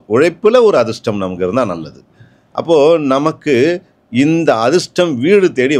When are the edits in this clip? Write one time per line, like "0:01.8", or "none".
none